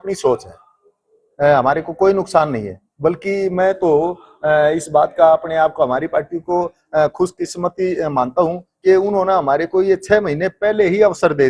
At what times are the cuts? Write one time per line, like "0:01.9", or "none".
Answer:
none